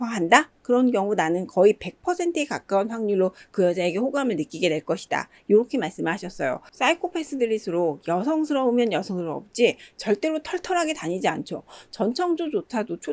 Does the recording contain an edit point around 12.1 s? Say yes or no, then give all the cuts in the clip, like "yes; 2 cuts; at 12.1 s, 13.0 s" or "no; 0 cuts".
no; 1 cut; at 6.7 s